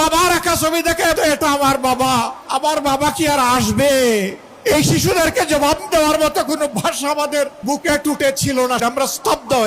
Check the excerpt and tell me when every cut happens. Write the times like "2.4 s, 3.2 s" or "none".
1.1 s, 2.4 s, 4.4 s, 7.6 s, 8.8 s